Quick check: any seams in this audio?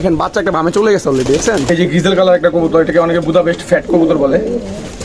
yes; 1 cut; at 1.7 s

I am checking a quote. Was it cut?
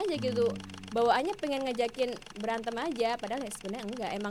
no; 0 cuts

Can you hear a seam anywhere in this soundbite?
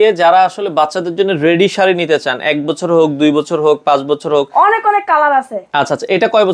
no; 0 cuts

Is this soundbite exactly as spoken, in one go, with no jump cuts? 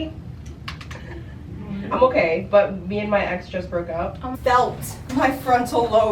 no; 1 cut; at 4.3 s

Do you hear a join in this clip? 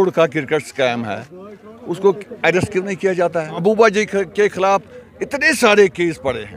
yes; 1 cut; at 3.6 s

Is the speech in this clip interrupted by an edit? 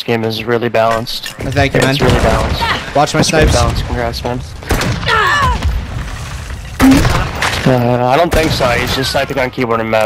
no; 0 cuts

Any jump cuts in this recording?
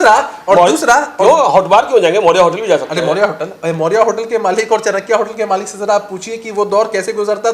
no; 0 cuts

